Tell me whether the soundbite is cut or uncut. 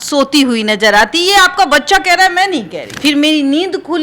cut